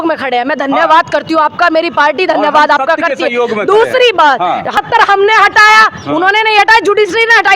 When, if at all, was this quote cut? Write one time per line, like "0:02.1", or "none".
0:04.8